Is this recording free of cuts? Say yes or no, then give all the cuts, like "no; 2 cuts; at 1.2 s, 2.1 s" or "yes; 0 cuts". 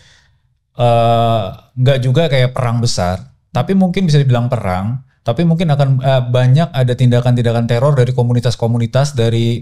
yes; 0 cuts